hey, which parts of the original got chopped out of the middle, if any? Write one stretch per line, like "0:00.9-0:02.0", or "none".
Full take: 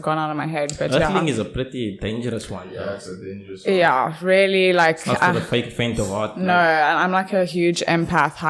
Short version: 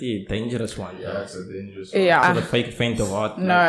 0:03.9-0:05.2